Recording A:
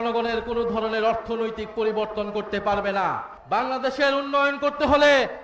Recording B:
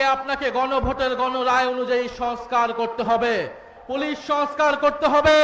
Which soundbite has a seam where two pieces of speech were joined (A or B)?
A